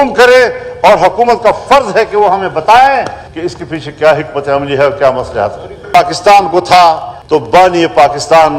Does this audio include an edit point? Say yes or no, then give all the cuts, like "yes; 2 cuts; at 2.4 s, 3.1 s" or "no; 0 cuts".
yes; 1 cut; at 5.9 s